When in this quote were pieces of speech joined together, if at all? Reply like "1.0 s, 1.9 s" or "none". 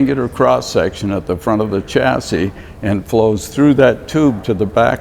none